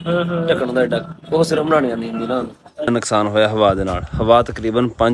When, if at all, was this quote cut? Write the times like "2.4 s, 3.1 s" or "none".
2.9 s